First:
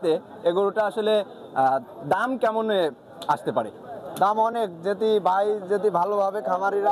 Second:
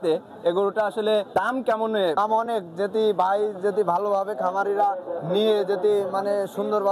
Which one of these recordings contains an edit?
second; 2 cuts; at 1.3 s, 2.2 s

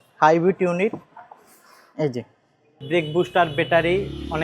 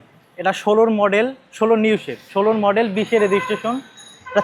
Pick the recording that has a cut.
first; 1 cut; at 2.8 s

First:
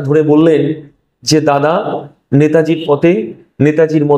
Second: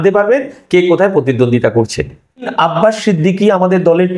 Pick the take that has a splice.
second; 1 cut; at 2.5 s

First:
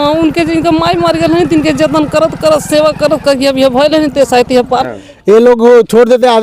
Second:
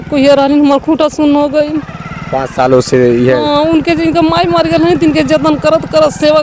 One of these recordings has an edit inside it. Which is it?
first; 1 cut; at 4.9 s

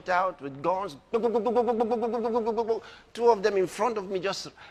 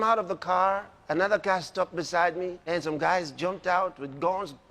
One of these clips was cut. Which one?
second; 2 cuts; at 0.9 s, 2.6 s

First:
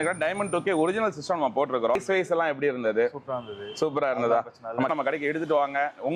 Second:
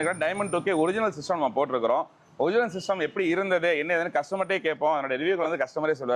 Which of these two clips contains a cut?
first; 2 cuts; at 2.0 s, 4.9 s

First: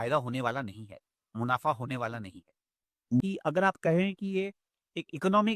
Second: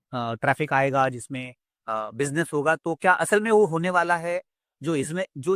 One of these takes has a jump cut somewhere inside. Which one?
first; 1 cut; at 3.2 s

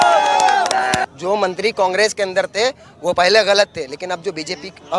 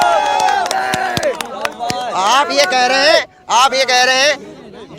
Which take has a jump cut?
first; 1 cut; at 1.1 s

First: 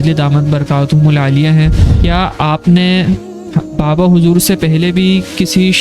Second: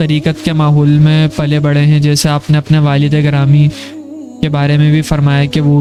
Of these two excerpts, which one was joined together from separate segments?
first; 1 cut; at 1.9 s

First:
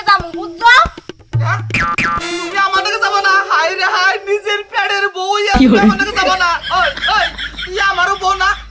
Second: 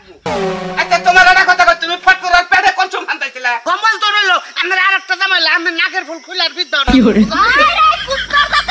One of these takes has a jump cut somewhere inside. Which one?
second; 1 cut; at 3.8 s

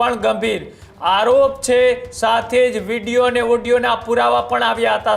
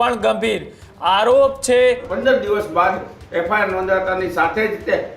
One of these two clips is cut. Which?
second; 1 cut; at 2.1 s

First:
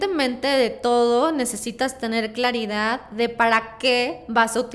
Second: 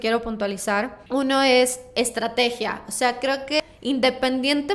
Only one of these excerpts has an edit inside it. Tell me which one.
second; 2 cuts; at 1.0 s, 3.6 s

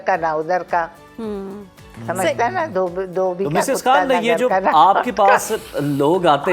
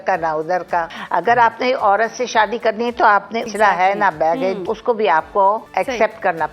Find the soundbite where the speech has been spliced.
second; 4 cuts; at 1.0 s, 3.5 s, 4.7 s, 5.6 s

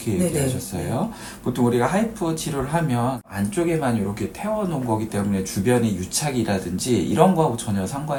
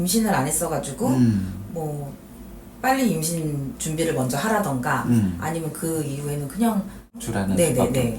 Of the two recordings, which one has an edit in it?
second; 1 cut; at 7.3 s

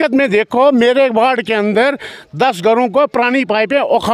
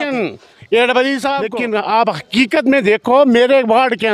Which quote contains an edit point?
second; 1 cut; at 1.5 s

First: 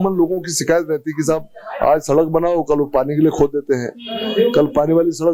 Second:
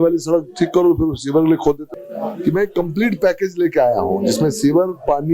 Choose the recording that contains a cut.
second; 1 cut; at 1.9 s

